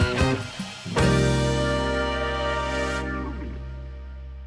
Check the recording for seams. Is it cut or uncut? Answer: uncut